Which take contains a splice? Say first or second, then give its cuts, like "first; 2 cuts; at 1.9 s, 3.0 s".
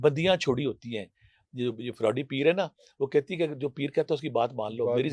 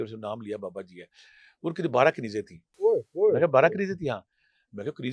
second; 1 cut; at 2.6 s